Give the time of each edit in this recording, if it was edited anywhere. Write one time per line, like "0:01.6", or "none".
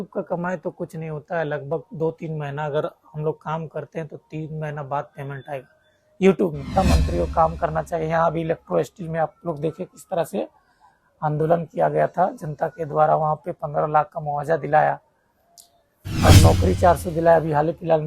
0:06.7